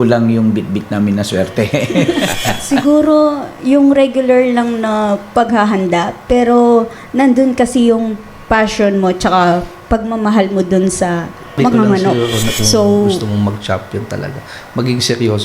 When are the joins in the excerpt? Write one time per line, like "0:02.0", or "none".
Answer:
0:02.6
0:13.2